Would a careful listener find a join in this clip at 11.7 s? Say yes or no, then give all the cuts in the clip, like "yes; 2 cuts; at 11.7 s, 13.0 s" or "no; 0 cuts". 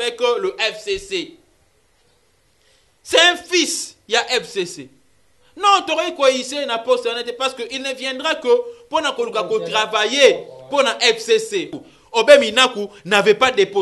yes; 1 cut; at 11.7 s